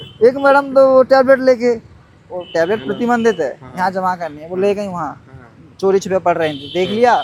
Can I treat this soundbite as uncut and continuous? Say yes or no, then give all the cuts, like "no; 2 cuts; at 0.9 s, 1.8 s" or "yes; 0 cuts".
yes; 0 cuts